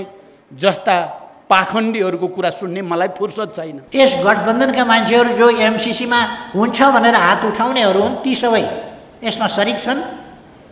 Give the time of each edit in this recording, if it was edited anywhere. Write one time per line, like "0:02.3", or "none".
0:03.8